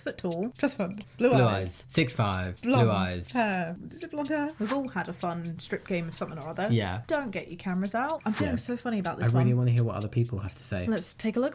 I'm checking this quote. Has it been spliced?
yes; 2 cuts; at 4.5 s, 8.2 s

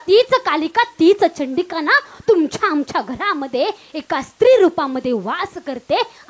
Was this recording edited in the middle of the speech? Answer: no; 0 cuts

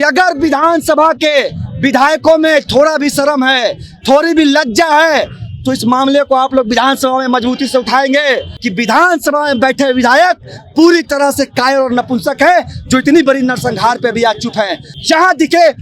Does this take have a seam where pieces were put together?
yes; 2 cuts; at 8.5 s, 14.9 s

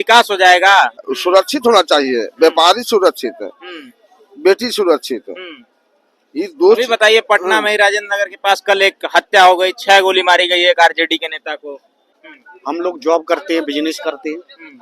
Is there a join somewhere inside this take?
yes; 2 cuts; at 1.0 s, 12.2 s

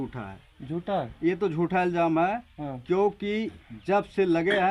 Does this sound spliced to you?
no; 0 cuts

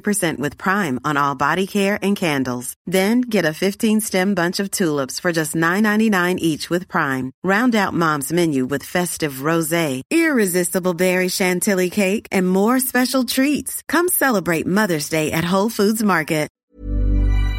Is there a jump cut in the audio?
yes; 1 cut; at 16.6 s

